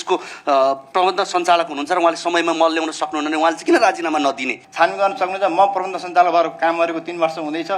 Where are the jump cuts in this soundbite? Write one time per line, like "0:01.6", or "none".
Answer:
0:04.6

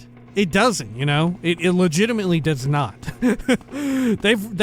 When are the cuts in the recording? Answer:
none

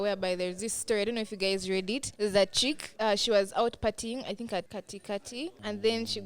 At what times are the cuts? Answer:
0:02.1
0:02.9
0:05.2

